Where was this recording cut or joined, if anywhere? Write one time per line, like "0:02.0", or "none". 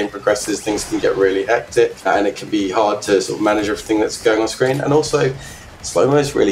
0:02.0